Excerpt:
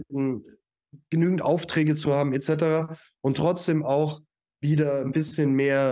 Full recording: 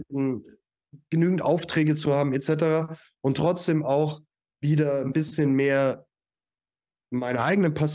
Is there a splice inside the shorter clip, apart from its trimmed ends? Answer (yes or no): no